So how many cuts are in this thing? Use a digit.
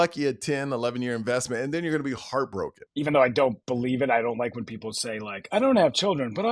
1